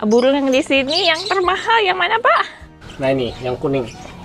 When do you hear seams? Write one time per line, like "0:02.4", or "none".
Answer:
0:02.8